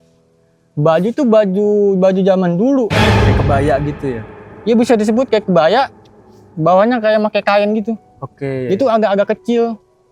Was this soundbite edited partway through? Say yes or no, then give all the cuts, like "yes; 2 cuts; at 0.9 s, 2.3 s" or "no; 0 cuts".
no; 0 cuts